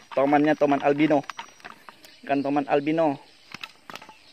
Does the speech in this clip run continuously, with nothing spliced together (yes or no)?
yes